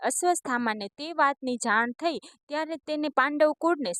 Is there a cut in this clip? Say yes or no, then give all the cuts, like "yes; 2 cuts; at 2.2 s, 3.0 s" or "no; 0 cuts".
no; 0 cuts